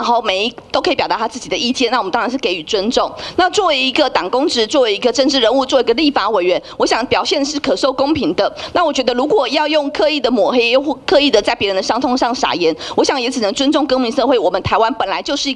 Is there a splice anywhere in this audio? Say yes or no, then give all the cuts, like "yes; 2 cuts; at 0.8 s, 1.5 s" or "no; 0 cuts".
no; 0 cuts